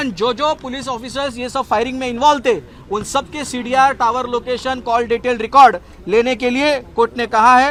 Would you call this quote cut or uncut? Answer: uncut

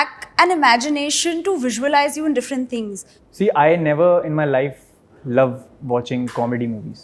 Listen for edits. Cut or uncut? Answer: cut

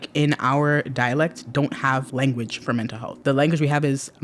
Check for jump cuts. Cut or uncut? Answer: cut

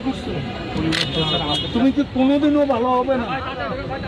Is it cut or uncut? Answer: uncut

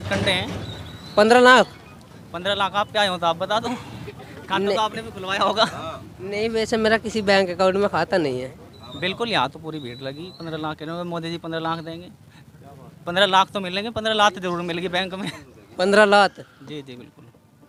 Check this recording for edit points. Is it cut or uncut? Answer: uncut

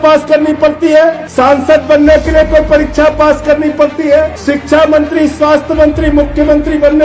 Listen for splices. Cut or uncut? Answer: cut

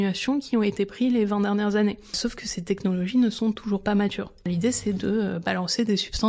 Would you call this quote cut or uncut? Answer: cut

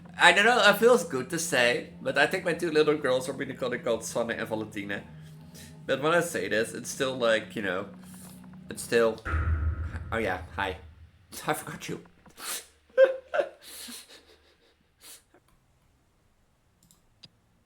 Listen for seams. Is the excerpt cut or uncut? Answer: cut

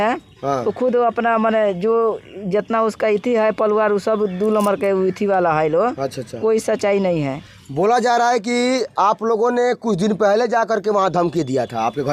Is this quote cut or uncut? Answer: uncut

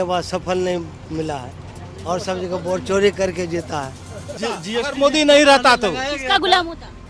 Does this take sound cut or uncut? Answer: cut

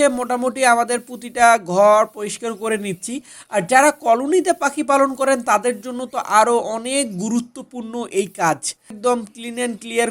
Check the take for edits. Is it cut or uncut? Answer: cut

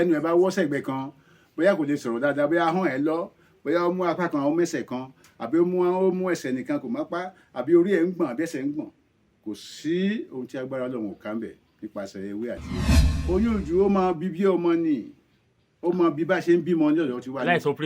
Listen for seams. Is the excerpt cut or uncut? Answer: cut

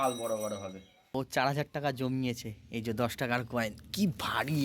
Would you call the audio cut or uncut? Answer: cut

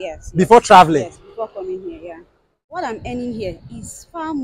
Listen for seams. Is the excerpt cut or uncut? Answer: cut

